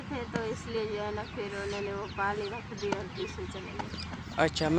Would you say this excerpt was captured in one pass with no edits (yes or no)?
yes